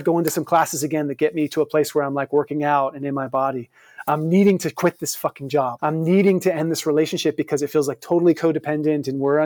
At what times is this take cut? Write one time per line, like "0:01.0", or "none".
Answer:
0:05.8